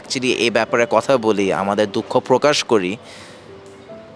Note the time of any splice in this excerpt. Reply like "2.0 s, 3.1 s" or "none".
none